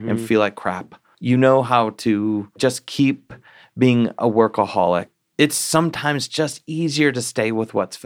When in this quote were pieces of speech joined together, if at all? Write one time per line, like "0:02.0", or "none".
0:01.0
0:02.6
0:05.1

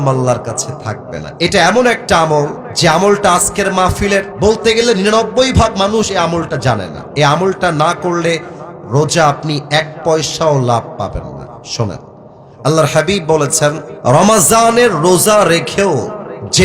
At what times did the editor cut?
0:02.6
0:04.3

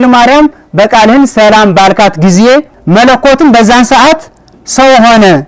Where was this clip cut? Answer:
0:02.8

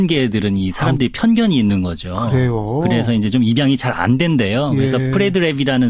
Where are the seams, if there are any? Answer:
0:03.6

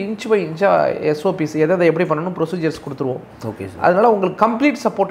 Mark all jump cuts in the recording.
none

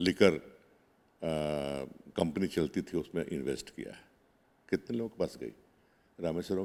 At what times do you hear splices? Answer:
none

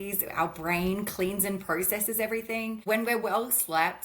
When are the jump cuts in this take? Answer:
0:02.8

